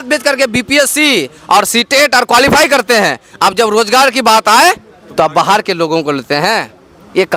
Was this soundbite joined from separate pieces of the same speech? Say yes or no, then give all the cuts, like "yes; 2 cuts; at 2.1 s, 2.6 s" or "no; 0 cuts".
no; 0 cuts